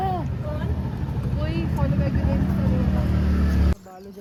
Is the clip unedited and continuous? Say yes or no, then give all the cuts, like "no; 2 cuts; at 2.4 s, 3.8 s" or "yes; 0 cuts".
yes; 0 cuts